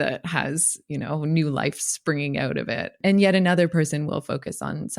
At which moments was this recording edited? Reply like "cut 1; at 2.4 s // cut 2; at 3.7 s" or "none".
cut 1; at 3.0 s